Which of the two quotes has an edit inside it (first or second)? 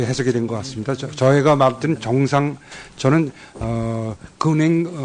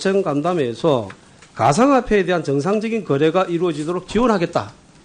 second